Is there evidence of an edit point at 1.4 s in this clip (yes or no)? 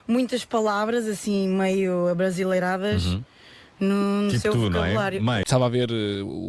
no